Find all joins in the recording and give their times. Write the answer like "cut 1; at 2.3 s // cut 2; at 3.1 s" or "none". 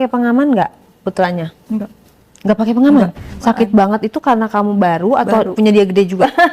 cut 1; at 3.3 s